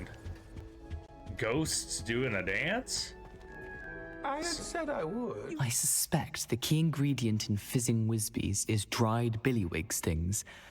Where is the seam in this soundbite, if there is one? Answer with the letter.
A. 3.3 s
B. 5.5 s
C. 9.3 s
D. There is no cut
B